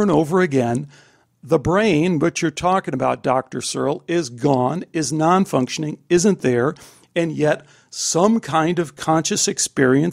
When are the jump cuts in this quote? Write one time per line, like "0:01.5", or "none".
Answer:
none